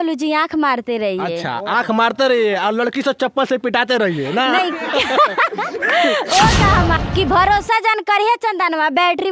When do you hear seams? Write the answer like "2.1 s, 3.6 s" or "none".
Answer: 7.0 s